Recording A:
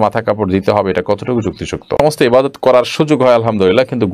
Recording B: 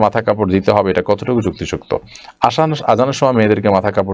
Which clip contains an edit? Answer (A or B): A